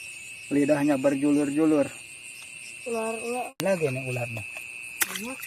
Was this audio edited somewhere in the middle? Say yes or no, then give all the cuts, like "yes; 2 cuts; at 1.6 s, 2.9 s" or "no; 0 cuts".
yes; 1 cut; at 3.6 s